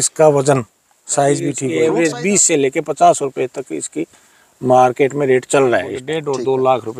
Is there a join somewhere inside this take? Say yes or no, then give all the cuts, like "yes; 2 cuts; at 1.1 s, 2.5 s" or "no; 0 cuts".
yes; 2 cuts; at 1.6 s, 6.1 s